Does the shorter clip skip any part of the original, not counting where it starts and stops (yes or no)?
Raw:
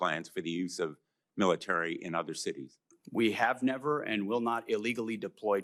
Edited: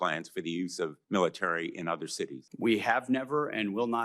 yes